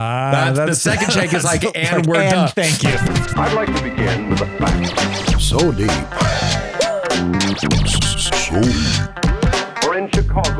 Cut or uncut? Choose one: cut